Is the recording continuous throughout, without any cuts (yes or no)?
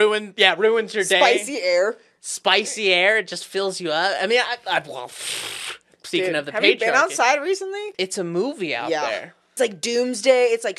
no